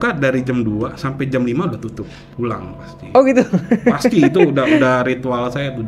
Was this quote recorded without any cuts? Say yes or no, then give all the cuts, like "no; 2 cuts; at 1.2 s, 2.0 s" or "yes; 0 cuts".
yes; 0 cuts